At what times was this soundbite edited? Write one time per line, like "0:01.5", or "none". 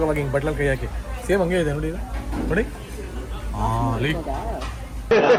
none